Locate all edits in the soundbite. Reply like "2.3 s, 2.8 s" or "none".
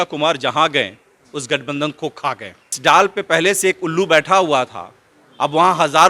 2.8 s